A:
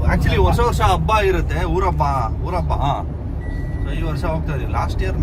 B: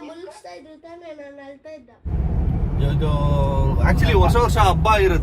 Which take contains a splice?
B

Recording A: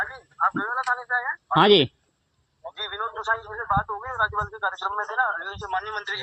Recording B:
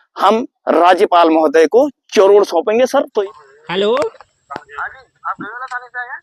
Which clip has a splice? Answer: B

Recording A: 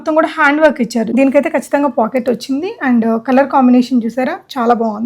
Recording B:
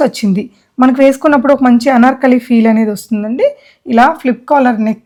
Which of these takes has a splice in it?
A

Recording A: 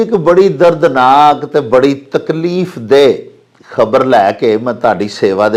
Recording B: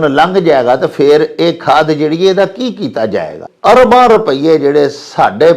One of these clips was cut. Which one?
B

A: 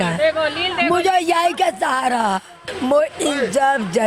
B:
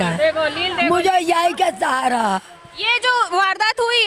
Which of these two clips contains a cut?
A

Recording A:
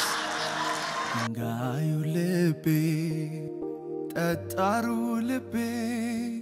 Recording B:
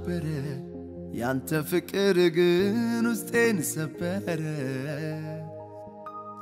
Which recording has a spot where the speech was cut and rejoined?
A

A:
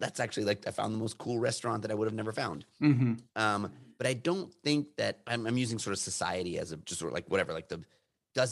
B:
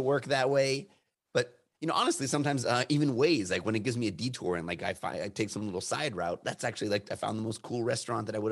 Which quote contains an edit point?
A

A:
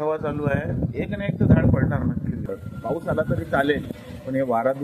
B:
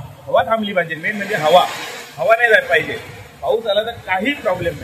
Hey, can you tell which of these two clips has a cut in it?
A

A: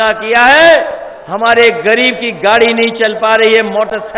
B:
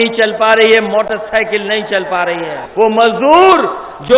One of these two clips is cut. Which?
B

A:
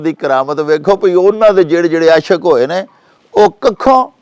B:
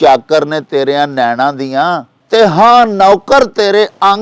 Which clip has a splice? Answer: B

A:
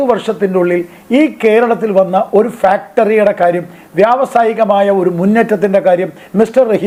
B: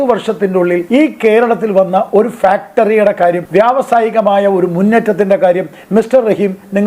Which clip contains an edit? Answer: B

